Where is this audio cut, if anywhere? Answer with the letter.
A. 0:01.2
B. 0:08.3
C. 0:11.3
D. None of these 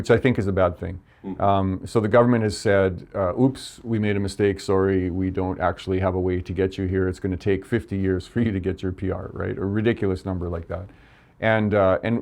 D